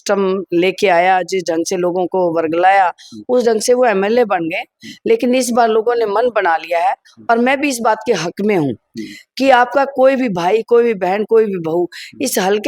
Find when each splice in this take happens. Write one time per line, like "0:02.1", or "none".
none